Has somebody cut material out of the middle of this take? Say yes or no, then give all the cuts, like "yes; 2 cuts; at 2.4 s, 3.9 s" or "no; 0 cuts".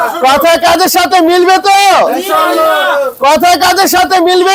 no; 0 cuts